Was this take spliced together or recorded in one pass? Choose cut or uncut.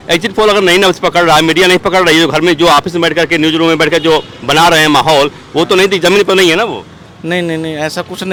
uncut